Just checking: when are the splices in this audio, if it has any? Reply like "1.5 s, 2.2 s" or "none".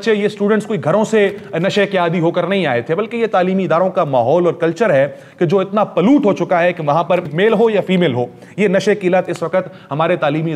7.3 s

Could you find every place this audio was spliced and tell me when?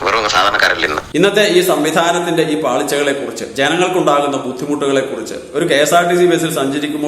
1.0 s

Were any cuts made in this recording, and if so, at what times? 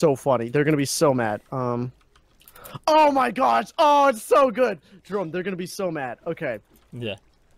none

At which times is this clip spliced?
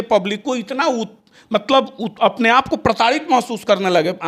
none

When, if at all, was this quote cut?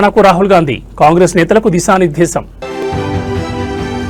none

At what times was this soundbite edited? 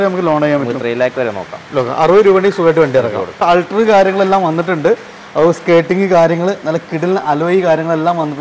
3.4 s

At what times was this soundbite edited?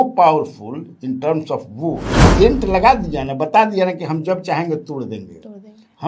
2.2 s

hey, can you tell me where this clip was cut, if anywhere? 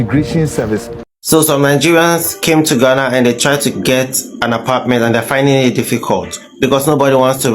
0.9 s

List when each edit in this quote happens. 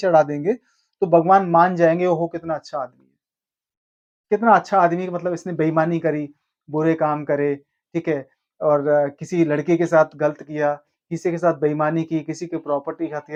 none

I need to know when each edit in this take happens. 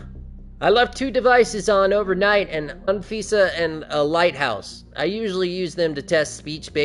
none

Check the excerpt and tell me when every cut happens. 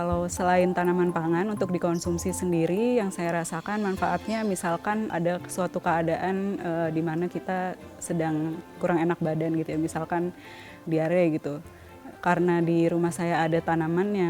none

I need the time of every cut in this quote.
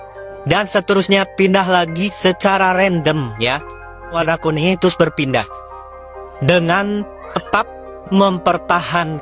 4.1 s

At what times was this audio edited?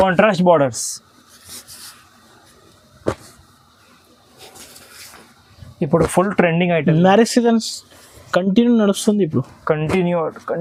none

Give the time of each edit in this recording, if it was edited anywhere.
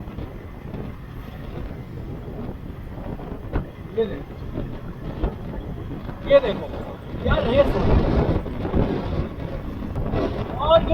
10.0 s

